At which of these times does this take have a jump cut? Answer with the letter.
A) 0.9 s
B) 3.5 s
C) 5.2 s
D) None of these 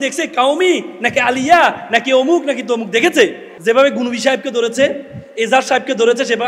B